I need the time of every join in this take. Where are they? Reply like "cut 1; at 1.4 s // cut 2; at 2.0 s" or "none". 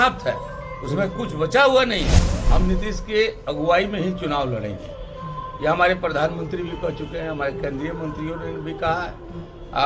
cut 1; at 2.3 s

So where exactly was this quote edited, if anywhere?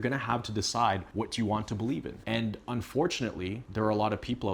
cut 1; at 1.1 s // cut 2; at 2.2 s // cut 3; at 3.6 s

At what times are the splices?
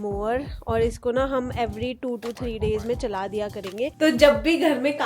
cut 1; at 3.9 s

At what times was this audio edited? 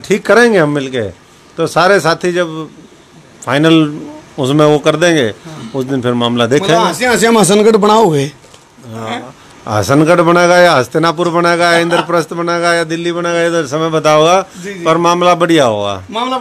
none

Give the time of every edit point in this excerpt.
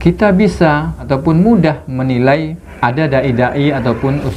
cut 1; at 1.0 s // cut 2; at 2.6 s

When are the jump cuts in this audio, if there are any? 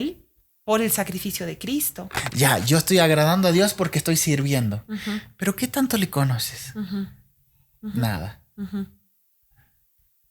cut 1; at 2.2 s

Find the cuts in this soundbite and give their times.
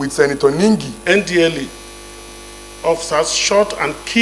cut 1; at 0.9 s

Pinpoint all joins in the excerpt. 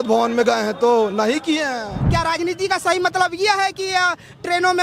cut 1; at 2.0 s

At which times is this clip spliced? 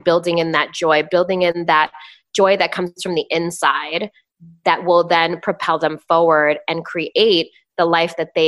none

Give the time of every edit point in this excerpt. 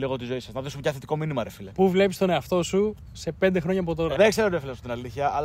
cut 1; at 1.7 s // cut 2; at 4.1 s

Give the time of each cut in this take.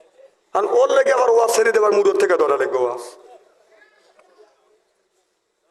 none

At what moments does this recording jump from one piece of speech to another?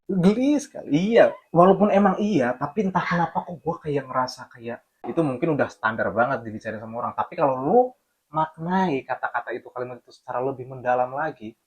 cut 1; at 5.0 s

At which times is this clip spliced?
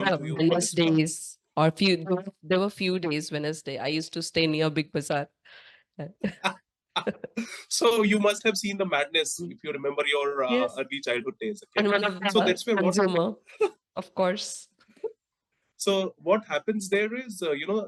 none

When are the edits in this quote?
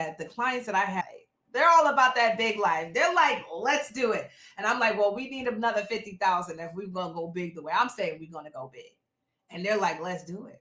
cut 1; at 1.0 s

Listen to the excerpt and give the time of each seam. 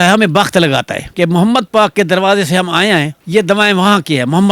cut 1; at 1.1 s

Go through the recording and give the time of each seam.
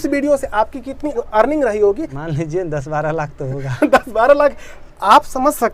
cut 1; at 1.1 s // cut 2; at 2.1 s

